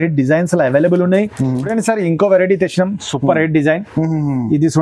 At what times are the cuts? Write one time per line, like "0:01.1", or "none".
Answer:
0:01.6